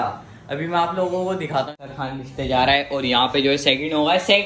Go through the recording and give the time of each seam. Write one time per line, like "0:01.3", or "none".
0:01.8